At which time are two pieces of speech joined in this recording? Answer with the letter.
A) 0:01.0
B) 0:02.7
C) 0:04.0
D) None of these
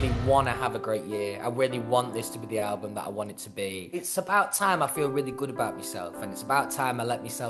C